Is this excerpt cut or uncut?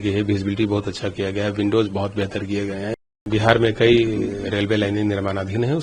cut